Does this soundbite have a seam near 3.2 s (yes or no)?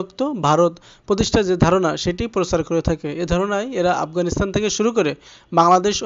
no